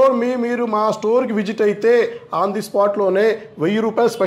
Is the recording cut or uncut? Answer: uncut